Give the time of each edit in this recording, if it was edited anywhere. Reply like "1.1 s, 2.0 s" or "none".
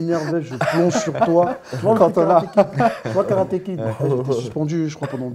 none